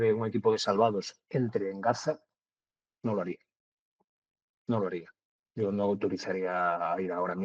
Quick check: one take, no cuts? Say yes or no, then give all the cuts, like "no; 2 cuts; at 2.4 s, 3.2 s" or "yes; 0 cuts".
yes; 0 cuts